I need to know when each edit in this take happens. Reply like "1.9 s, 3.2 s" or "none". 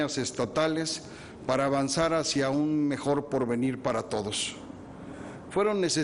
1.8 s

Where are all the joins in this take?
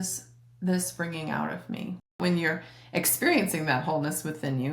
2.2 s

